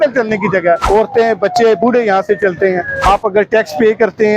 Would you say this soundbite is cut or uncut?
cut